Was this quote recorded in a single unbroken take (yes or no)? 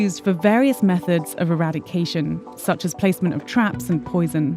yes